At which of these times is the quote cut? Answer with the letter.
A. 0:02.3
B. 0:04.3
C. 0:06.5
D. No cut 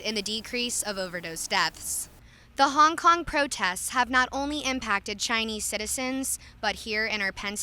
A